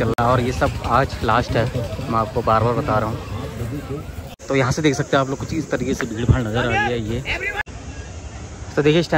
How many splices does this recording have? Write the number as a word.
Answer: two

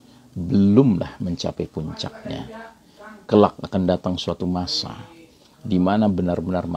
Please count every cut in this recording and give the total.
zero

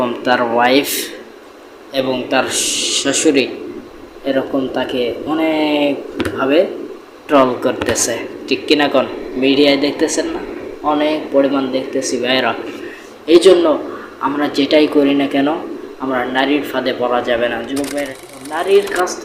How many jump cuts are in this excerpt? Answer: one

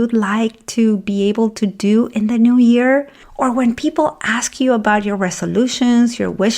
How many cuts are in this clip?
one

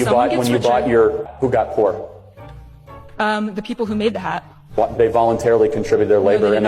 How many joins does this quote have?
one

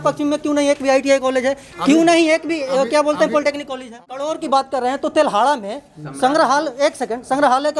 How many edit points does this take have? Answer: one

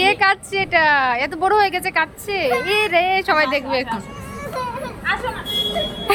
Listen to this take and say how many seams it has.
zero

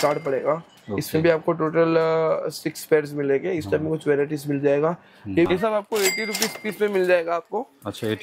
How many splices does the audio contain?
one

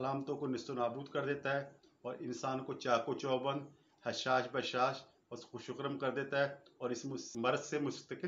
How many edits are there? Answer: one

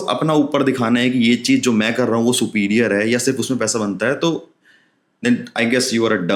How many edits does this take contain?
zero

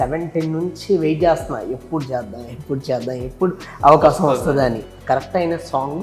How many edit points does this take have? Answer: one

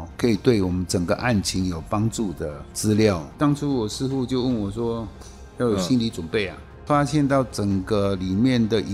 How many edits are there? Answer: two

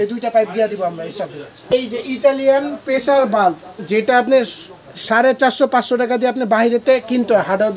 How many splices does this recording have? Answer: one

